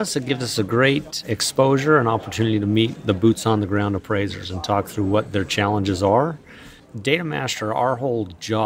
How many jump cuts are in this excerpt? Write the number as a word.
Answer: one